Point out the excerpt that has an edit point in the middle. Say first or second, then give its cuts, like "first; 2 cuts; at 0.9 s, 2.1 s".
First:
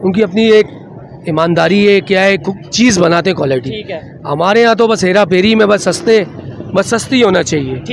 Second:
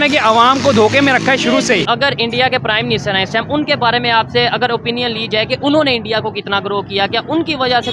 second; 1 cut; at 1.9 s